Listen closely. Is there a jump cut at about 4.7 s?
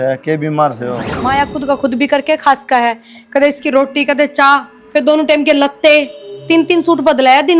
no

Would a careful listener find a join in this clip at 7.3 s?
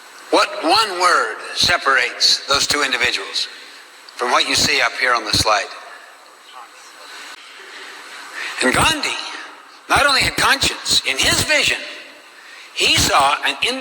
yes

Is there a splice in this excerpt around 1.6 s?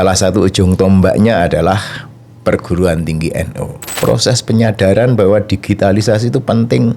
no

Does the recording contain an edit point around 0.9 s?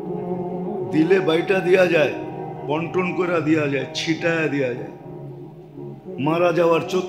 yes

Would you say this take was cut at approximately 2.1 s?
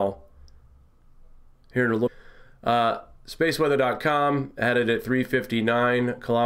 no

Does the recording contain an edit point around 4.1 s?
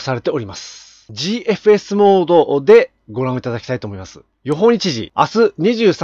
no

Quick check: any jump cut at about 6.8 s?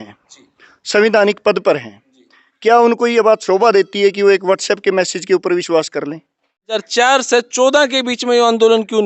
yes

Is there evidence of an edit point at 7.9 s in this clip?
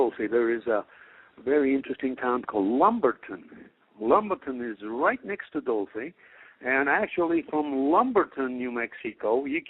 yes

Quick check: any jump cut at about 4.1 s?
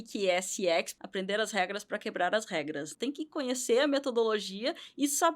no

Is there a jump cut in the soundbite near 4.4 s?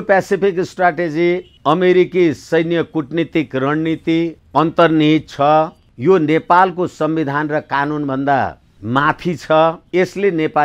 yes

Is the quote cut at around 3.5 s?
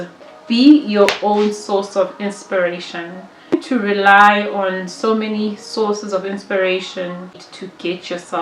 yes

